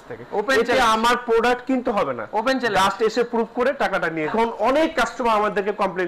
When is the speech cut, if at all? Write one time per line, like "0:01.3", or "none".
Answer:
0:04.3